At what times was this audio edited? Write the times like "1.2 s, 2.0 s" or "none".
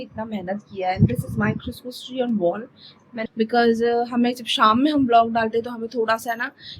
3.1 s

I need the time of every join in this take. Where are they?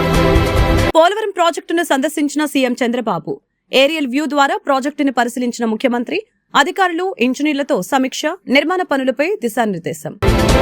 0.9 s

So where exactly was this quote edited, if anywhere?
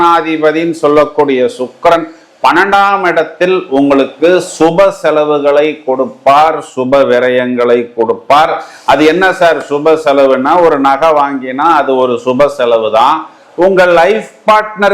none

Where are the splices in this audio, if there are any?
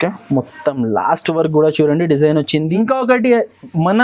2.8 s

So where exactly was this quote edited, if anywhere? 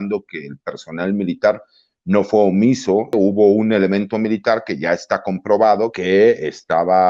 3.1 s, 5.9 s

